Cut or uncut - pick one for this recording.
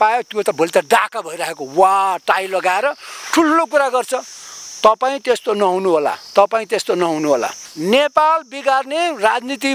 cut